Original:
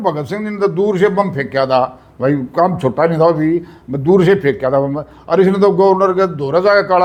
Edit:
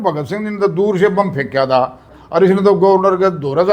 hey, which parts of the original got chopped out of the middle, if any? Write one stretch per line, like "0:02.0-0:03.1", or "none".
0:02.1-0:05.0